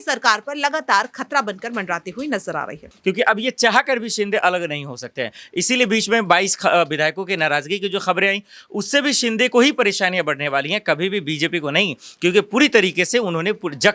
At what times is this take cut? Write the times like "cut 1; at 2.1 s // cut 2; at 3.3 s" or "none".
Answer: cut 1; at 2.8 s